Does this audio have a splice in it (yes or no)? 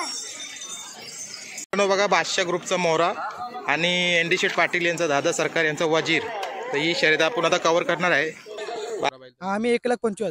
yes